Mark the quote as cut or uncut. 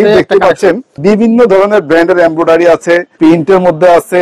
cut